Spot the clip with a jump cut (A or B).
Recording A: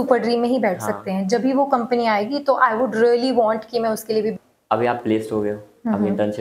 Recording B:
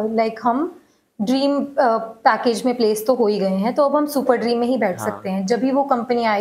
A